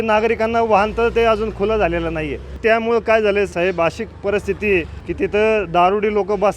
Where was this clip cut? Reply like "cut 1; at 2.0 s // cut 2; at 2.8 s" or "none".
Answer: cut 1; at 2.6 s // cut 2; at 3.5 s // cut 3; at 5.0 s